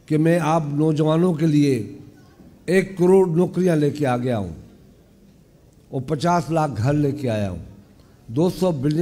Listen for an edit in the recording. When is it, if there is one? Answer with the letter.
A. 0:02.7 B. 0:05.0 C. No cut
C